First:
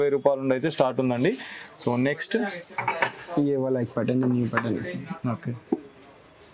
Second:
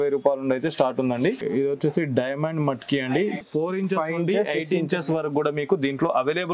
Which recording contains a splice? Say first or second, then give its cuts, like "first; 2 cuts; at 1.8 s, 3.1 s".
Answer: second; 2 cuts; at 1.5 s, 3.5 s